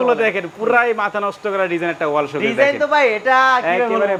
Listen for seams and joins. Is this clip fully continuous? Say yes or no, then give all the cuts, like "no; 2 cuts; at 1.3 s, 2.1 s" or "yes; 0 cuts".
yes; 0 cuts